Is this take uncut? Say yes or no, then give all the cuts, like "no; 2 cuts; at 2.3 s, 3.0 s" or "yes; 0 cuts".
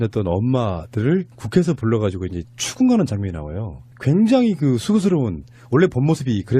no; 1 cut; at 2.0 s